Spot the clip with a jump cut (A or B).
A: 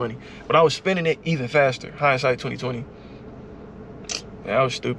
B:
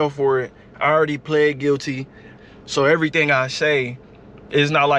B